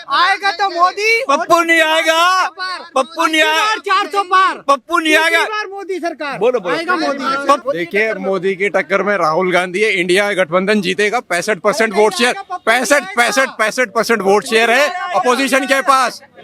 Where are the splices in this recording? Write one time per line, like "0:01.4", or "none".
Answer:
0:07.6